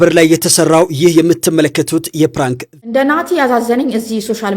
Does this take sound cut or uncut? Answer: cut